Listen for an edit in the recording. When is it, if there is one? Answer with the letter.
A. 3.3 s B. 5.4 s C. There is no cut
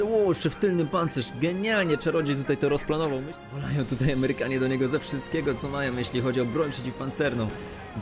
A